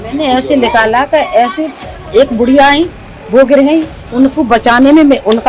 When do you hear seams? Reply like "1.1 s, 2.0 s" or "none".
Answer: none